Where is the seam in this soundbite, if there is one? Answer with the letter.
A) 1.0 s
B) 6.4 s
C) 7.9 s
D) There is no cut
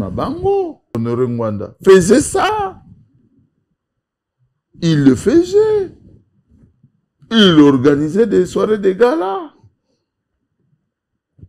A